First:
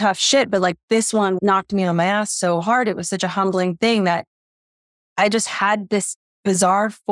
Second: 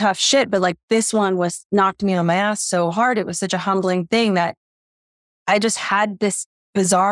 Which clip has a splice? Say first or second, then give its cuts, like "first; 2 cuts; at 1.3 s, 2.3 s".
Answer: first; 1 cut; at 1.4 s